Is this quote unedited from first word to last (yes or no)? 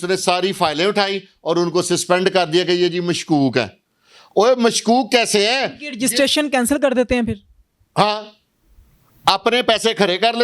yes